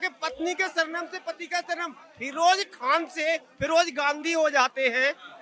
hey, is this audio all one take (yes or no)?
yes